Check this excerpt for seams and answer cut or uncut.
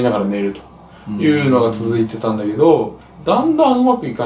uncut